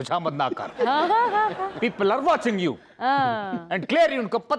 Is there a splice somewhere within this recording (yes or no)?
no